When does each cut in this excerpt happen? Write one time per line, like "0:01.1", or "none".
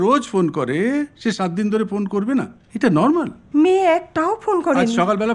0:03.4

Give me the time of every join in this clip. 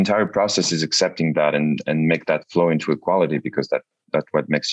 none

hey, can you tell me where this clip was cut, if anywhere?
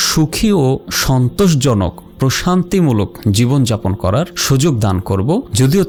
none

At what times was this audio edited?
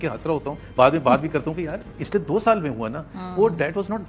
0:02.0

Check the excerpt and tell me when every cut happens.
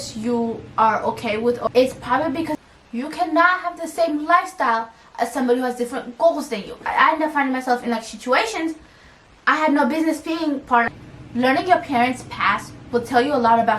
0:01.7
0:02.5
0:06.8
0:10.9

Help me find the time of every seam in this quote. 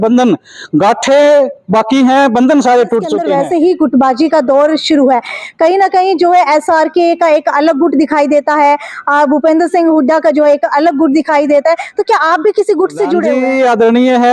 0:03.2
0:13.3

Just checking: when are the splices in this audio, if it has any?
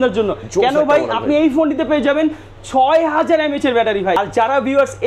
0:04.2

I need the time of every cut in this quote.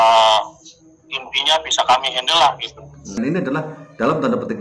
0:03.1

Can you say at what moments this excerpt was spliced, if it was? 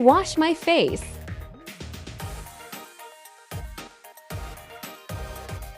0:00.9

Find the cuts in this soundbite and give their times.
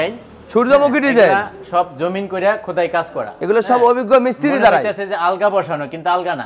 none

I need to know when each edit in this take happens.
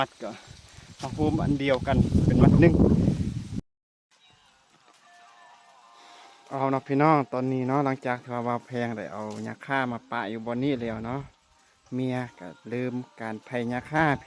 0:03.5

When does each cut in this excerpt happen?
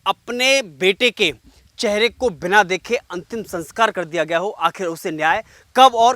none

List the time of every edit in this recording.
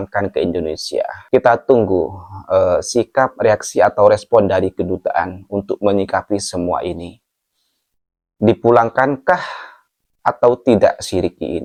none

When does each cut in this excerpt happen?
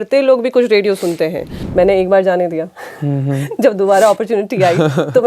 0:01.6

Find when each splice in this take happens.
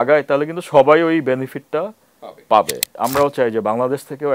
0:02.9

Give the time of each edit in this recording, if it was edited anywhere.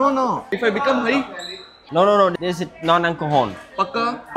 none

